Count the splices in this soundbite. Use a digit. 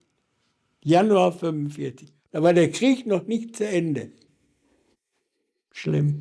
0